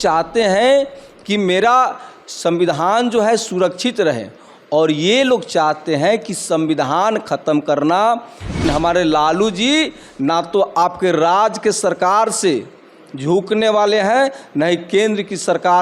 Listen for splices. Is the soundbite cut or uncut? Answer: cut